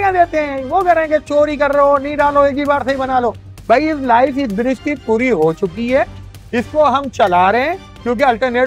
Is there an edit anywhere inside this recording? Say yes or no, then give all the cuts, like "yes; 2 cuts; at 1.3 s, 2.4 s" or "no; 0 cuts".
no; 0 cuts